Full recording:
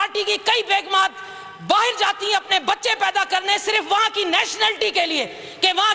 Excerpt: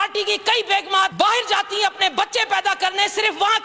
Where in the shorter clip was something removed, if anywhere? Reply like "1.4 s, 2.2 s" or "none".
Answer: 1.1 s

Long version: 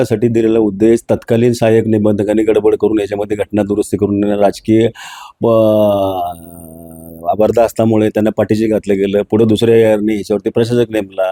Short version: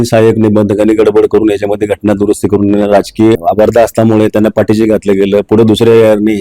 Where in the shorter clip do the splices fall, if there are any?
3.4 s

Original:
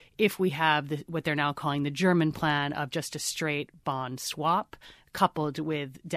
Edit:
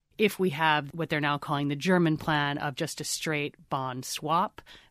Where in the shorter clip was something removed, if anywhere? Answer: 0.9 s

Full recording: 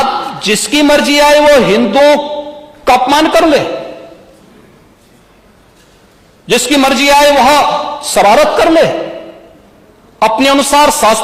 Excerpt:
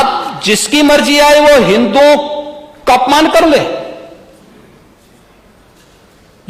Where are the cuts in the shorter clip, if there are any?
none

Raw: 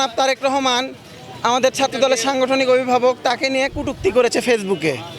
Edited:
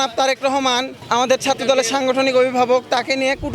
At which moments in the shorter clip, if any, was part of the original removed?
1.0 s

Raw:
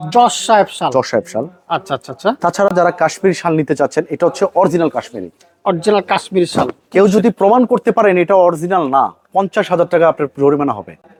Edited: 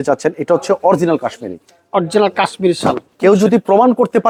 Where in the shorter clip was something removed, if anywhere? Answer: none

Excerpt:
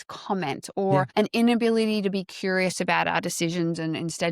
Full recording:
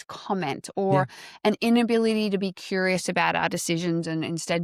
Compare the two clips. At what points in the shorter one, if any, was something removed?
1.1 s

